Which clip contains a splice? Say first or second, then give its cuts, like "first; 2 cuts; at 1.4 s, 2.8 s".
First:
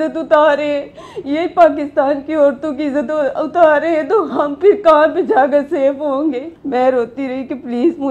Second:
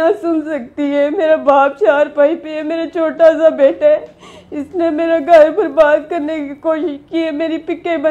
first; 1 cut; at 6.5 s